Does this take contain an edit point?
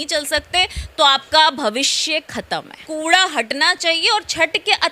yes; 1 cut; at 2.8 s

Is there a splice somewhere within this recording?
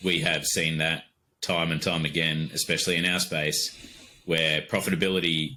no; 0 cuts

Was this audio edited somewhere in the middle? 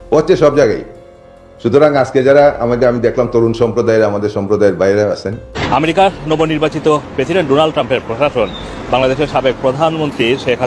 yes; 1 cut; at 5.5 s

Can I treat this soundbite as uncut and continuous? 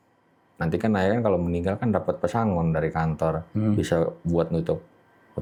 yes; 0 cuts

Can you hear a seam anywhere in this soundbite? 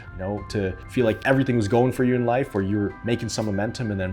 yes; 1 cut; at 3.0 s

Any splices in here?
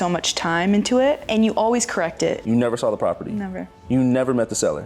yes; 2 cuts; at 1.2 s, 2.4 s

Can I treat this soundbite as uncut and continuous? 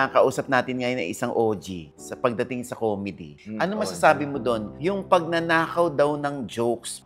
yes; 0 cuts

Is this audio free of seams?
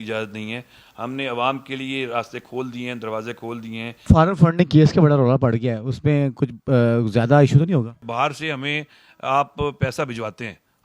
no; 2 cuts; at 4.0 s, 8.0 s

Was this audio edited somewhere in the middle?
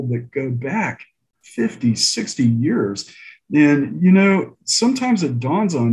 no; 0 cuts

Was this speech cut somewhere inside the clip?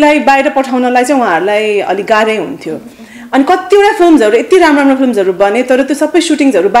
no; 0 cuts

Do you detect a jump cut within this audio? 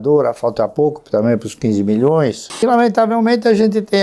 yes; 1 cut; at 2.5 s

